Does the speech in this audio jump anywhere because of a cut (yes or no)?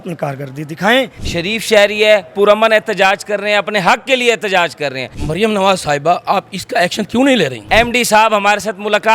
yes